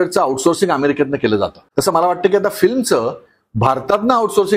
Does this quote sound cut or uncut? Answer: cut